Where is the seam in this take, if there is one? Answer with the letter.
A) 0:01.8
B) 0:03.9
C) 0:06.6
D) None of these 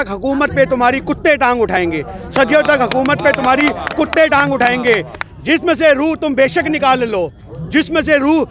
D